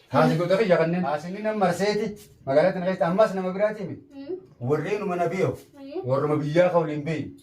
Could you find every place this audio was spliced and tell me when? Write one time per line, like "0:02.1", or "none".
0:01.3